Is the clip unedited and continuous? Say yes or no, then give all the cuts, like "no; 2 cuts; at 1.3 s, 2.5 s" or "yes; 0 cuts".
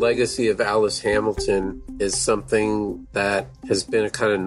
no; 2 cuts; at 1.8 s, 3.5 s